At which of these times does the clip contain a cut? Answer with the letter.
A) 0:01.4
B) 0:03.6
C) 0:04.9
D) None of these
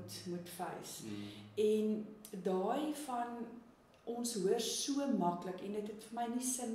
D